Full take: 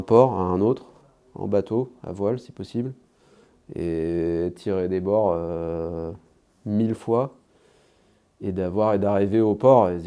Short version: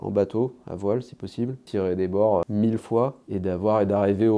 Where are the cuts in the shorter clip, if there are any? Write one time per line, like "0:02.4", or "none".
0:01.6
0:02.5
0:03.2